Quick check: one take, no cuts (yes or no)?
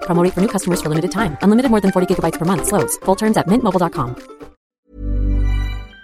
no